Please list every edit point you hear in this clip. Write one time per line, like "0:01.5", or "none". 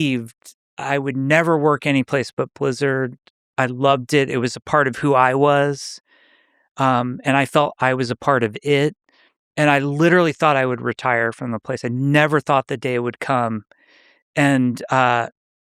none